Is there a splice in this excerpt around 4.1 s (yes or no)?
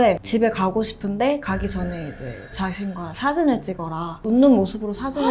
yes